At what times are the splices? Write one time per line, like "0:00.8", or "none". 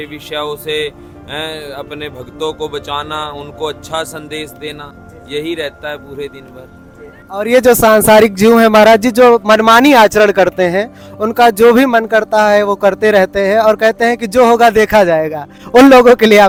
none